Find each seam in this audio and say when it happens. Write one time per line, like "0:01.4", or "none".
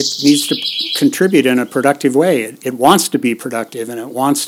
none